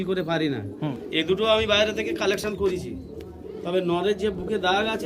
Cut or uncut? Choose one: cut